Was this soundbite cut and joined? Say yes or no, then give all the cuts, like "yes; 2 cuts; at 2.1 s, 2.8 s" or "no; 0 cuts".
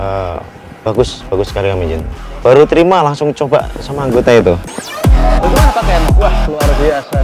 yes; 1 cut; at 2.1 s